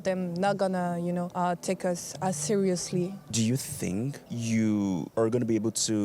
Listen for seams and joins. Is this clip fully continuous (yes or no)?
no